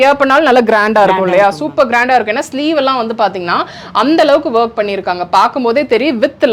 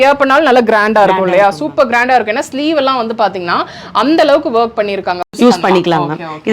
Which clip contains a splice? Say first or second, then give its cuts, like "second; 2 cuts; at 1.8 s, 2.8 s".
second; 1 cut; at 5.2 s